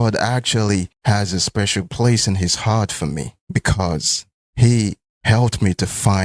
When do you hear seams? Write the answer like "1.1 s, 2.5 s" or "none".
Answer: none

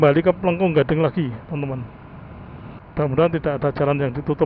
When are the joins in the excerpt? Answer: 2.8 s

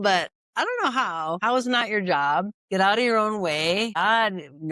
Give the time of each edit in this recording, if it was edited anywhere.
1.4 s, 2.6 s, 4.0 s

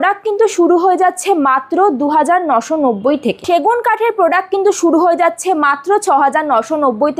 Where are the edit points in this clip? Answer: 3.4 s

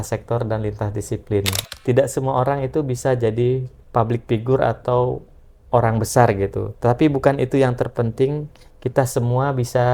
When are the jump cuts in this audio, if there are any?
1.6 s

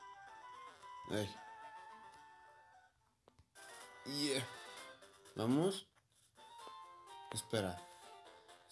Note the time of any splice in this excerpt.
0.9 s

